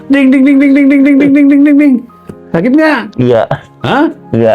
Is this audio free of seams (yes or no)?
yes